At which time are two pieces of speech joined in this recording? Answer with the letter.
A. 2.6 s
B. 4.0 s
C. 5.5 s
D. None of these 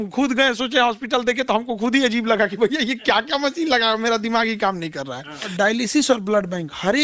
C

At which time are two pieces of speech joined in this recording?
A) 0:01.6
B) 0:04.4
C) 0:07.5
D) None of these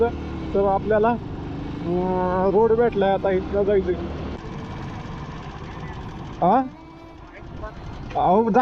B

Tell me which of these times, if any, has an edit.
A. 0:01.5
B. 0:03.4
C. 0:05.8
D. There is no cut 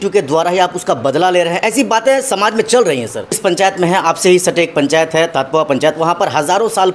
B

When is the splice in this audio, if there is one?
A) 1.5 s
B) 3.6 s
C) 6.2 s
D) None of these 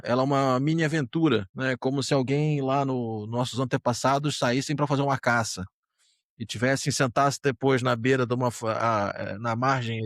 A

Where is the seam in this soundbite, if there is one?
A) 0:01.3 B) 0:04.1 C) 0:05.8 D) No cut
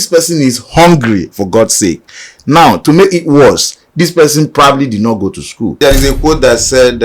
C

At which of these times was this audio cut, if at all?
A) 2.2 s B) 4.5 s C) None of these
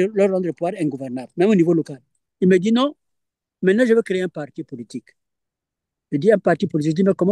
A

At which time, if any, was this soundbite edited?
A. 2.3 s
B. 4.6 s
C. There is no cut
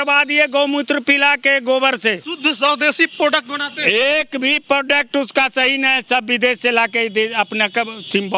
A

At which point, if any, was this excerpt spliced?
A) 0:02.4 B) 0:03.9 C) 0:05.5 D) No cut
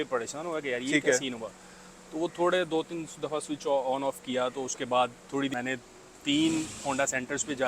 C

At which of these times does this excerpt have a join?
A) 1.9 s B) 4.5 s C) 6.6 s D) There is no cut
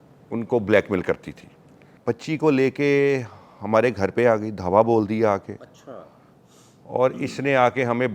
A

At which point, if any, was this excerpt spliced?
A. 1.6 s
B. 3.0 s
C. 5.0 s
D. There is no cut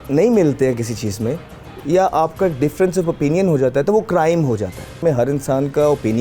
C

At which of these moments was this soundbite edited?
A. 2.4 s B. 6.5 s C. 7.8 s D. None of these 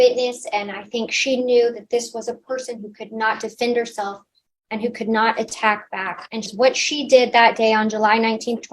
B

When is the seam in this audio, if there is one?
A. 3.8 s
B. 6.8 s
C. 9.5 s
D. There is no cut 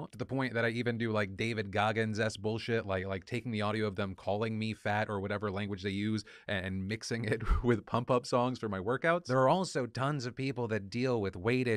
A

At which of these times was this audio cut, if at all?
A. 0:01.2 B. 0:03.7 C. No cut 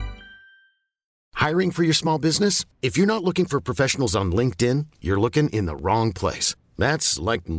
A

